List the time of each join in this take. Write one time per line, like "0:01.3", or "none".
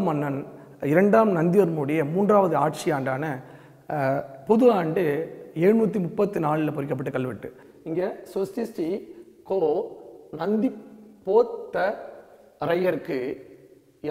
none